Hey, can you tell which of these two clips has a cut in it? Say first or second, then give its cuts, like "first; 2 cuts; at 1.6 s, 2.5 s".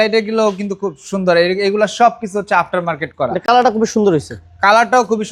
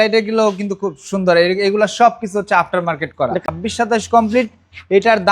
second; 1 cut; at 3.4 s